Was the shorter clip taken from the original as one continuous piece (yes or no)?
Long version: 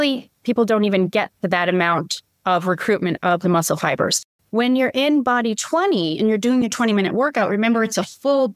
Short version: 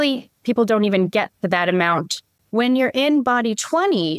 no